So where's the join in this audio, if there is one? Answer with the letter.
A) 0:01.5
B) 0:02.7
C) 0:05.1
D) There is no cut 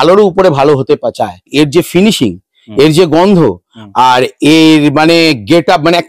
A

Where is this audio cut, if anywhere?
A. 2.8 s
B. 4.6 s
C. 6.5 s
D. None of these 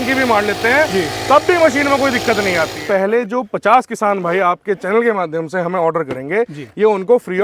A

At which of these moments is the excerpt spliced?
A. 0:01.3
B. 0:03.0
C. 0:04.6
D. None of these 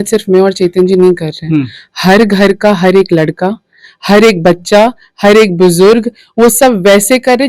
D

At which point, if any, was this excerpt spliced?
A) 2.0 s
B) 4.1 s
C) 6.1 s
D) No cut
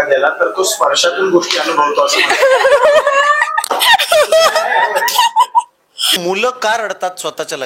C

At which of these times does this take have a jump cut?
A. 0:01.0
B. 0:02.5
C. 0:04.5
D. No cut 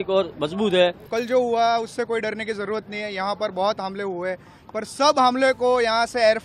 A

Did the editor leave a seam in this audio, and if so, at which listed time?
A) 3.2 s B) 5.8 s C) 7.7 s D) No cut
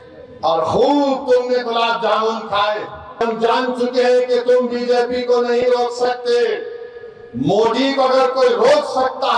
A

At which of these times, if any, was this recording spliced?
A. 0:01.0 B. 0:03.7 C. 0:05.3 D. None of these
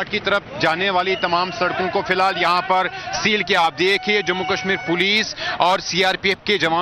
B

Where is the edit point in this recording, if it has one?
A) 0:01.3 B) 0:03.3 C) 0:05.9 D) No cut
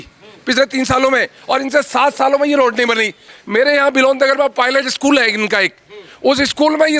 B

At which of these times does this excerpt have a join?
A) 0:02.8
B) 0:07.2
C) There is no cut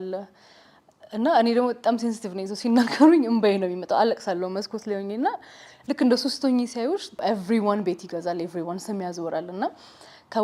B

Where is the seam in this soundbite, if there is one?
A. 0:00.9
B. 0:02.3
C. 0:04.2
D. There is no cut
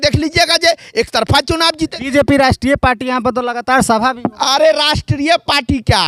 D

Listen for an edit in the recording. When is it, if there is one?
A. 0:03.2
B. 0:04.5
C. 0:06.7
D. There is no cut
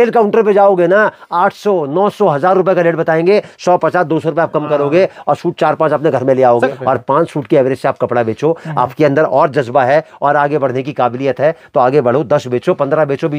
C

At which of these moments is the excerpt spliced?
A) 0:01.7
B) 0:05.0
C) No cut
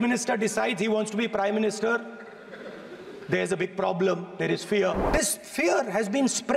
B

